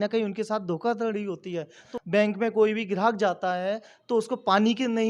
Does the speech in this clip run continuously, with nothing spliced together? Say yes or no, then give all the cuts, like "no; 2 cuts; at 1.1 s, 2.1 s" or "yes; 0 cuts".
no; 1 cut; at 1.8 s